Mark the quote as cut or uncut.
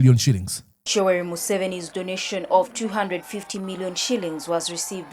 uncut